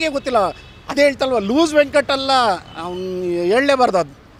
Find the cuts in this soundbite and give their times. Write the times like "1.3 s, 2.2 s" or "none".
none